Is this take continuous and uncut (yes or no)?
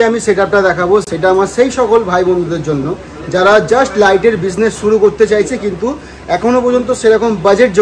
yes